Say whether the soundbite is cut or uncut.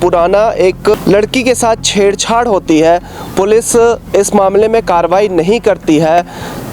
cut